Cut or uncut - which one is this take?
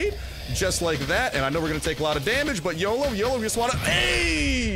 uncut